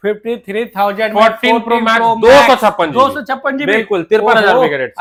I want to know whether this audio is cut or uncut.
uncut